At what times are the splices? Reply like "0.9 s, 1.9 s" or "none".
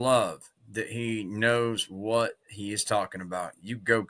none

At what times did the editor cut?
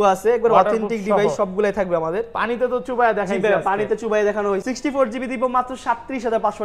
4.6 s

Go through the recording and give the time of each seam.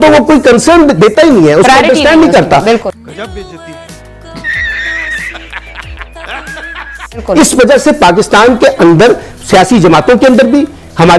none

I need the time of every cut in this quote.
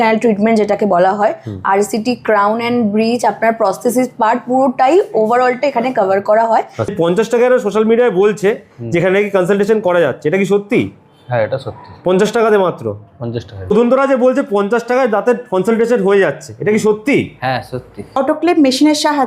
6.9 s, 13.5 s, 18.1 s

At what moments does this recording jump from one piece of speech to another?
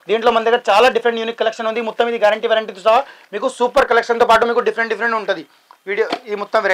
none

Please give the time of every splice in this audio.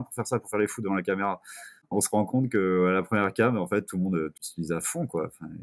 1.7 s, 4.4 s

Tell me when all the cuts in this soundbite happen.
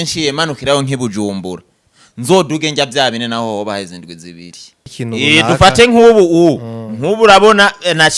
4.9 s

